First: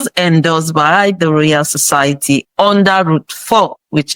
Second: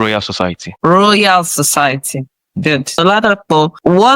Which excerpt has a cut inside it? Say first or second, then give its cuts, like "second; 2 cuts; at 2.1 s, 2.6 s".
second; 1 cut; at 3.0 s